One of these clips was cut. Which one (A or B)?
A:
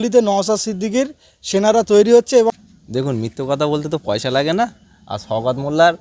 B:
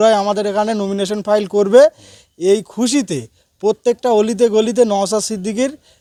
A